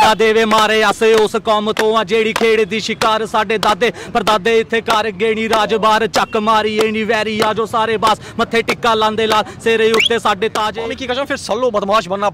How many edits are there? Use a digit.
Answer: 1